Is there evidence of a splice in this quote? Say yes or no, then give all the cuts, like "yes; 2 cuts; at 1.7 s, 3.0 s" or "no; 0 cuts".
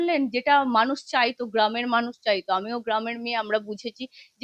no; 0 cuts